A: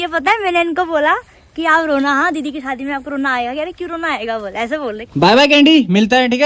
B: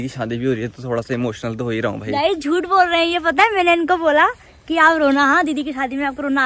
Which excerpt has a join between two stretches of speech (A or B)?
A